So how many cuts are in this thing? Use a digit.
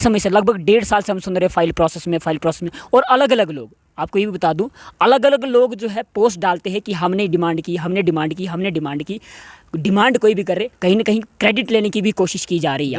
0